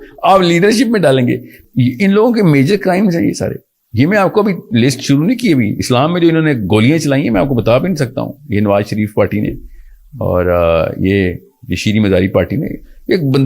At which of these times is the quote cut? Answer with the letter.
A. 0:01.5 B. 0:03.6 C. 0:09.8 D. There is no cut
A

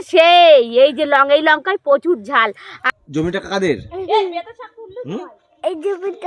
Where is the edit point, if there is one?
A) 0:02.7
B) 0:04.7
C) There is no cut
A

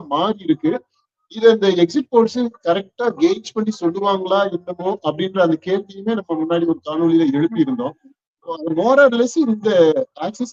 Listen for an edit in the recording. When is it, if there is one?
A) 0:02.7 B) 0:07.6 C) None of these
C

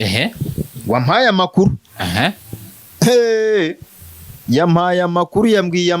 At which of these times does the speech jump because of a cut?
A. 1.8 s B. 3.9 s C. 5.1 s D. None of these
D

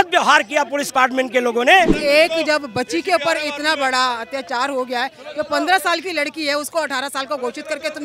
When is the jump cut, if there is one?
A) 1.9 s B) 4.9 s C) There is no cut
A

